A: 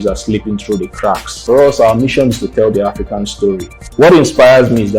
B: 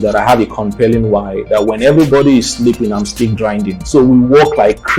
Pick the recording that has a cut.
A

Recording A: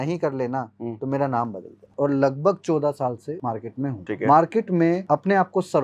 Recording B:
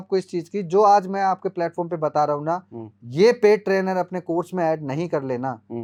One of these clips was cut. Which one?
A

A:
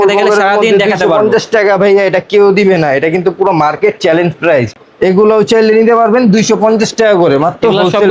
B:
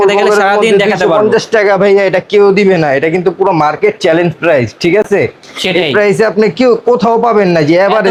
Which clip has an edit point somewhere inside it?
A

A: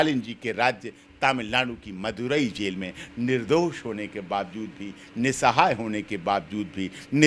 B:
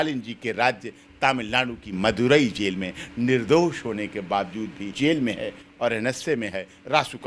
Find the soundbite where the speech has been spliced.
B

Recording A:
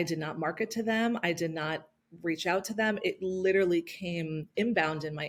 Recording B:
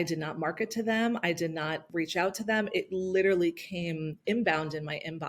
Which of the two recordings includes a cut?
B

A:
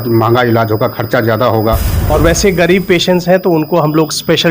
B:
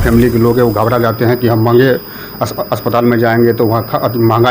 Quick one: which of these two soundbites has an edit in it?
A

